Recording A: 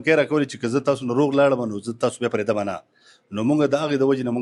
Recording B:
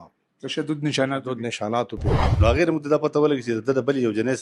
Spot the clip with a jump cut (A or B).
B